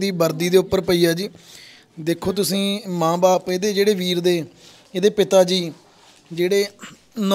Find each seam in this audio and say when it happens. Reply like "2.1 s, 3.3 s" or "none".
none